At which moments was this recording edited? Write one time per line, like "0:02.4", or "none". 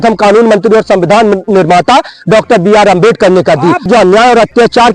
0:03.9

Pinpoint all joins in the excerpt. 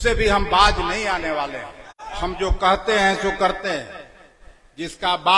0:02.1

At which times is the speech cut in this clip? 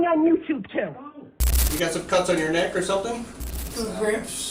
0:01.6

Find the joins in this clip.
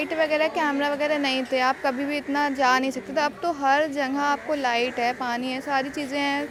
none

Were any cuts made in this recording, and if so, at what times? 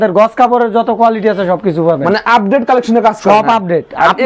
none

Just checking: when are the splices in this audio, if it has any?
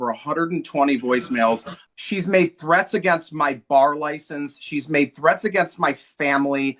0:01.7

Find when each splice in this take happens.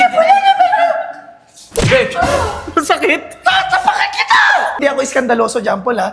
0:04.8

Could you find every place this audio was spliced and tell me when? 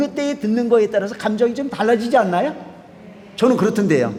none

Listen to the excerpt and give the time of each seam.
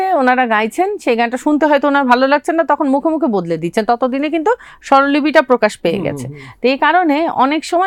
none

